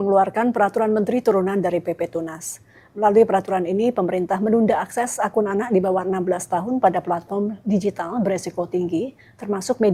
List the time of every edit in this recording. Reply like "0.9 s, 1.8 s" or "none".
none